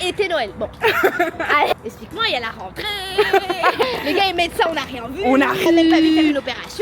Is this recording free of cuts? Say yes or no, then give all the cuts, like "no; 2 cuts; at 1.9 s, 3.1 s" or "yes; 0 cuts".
no; 2 cuts; at 3.8 s, 5.7 s